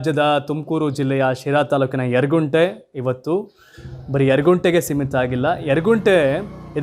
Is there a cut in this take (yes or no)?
no